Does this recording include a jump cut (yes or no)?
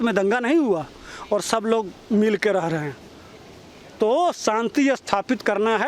no